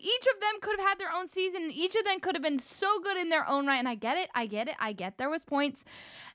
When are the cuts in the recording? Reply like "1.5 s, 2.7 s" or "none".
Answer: none

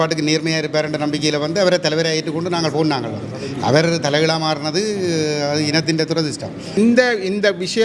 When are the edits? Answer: 6.8 s

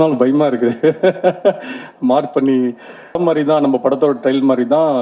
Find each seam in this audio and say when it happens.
3.2 s

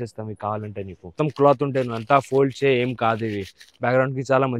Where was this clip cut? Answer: 1.1 s

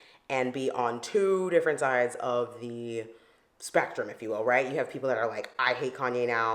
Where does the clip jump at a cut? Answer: none

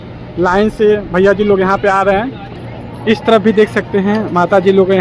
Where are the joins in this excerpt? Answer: 2.4 s

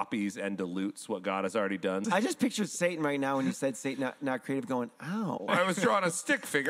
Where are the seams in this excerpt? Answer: 2.0 s, 5.5 s

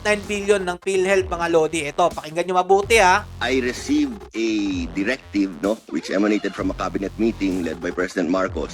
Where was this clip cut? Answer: 3.3 s

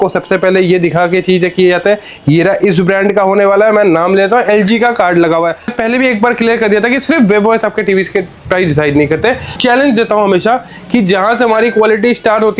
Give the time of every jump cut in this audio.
5.7 s, 9.6 s

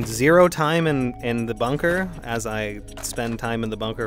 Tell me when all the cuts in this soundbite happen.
none

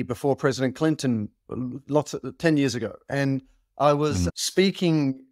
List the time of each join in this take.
none

